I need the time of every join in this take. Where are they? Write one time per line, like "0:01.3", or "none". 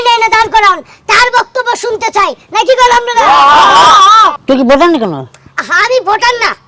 0:04.3